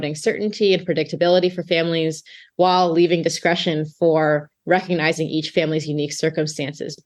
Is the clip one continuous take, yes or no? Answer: yes